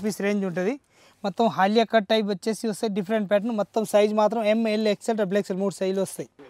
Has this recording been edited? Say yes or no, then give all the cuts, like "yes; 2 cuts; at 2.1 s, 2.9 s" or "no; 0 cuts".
no; 0 cuts